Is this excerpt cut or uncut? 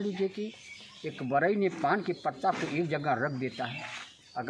uncut